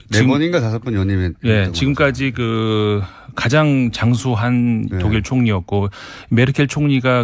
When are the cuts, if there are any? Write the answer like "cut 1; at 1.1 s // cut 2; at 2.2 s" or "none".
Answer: none